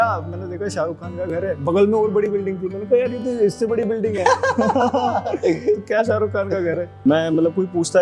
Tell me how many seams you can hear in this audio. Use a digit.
1